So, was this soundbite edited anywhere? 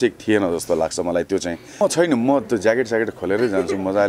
yes; 1 cut; at 1.8 s

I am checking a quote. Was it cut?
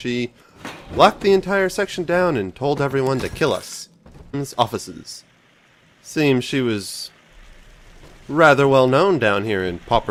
no; 0 cuts

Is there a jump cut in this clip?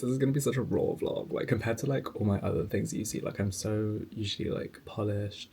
no; 0 cuts

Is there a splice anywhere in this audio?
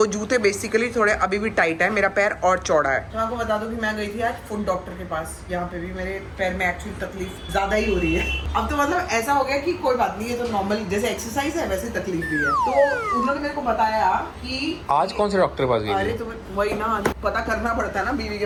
no; 0 cuts

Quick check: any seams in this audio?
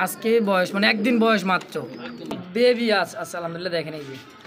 yes; 1 cut; at 2.4 s

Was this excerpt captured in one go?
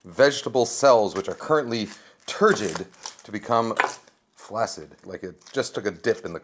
no; 1 cut; at 5.2 s

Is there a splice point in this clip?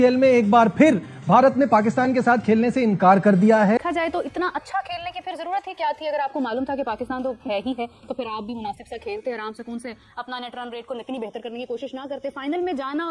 yes; 1 cut; at 3.8 s

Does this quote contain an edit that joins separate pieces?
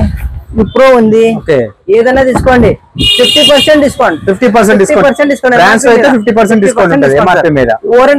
no; 0 cuts

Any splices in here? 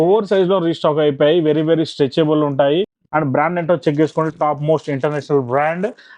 yes; 1 cut; at 3.0 s

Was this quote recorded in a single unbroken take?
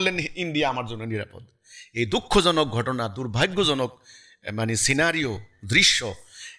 yes; 0 cuts

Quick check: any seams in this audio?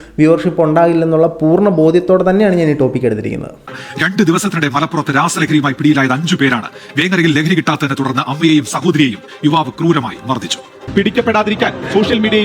yes; 2 cuts; at 3.7 s, 10.7 s

